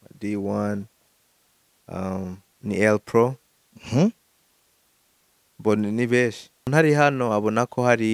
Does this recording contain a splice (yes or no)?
yes